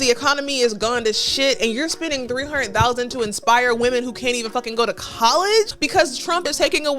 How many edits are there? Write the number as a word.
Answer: one